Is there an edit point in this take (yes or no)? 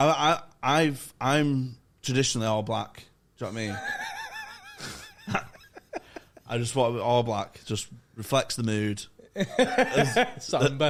no